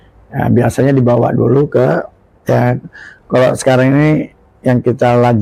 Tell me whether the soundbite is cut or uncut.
uncut